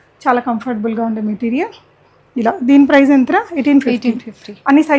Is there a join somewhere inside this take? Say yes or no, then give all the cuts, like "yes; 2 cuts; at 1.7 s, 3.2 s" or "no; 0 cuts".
no; 0 cuts